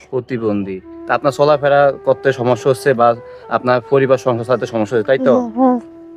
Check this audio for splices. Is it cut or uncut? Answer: uncut